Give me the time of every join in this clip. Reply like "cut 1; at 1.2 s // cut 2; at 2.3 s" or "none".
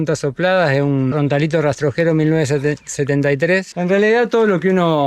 cut 1; at 3.7 s